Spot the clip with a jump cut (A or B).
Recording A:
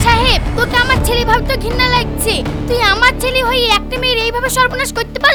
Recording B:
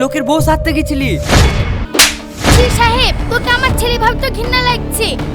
B